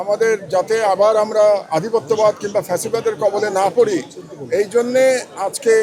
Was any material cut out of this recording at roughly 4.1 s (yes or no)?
no